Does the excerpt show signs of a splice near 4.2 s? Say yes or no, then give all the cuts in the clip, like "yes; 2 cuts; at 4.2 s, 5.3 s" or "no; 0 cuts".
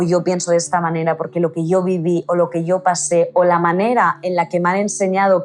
no; 0 cuts